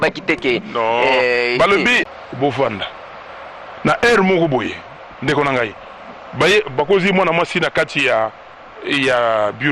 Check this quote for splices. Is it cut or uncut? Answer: cut